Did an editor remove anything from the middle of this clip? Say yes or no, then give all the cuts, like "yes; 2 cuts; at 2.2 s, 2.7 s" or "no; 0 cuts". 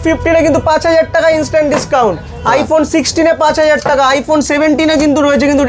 no; 0 cuts